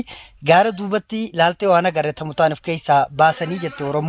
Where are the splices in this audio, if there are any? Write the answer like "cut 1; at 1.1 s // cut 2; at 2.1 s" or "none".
none